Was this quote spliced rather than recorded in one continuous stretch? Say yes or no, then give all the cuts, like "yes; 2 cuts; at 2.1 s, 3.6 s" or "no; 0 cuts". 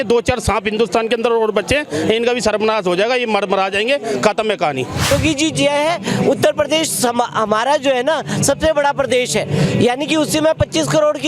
yes; 1 cut; at 5.1 s